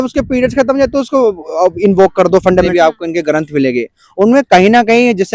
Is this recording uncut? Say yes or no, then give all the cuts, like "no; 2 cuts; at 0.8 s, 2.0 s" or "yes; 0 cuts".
no; 1 cut; at 2.7 s